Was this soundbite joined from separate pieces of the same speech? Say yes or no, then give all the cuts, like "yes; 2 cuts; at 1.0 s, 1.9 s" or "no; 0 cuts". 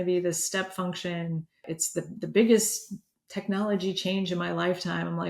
yes; 1 cut; at 1.6 s